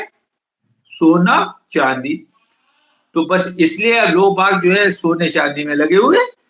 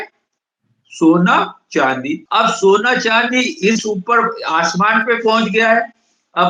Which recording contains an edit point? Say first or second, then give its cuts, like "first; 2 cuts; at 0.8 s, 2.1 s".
second; 1 cut; at 2.2 s